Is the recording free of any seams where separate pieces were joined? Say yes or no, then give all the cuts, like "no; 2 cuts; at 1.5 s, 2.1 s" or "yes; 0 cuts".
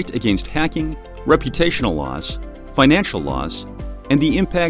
yes; 0 cuts